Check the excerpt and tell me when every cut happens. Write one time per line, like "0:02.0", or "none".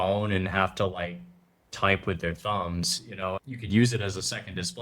0:03.4